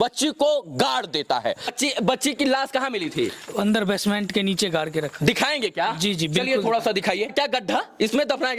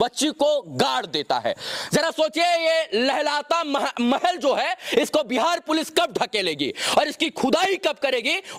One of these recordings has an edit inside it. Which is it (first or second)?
first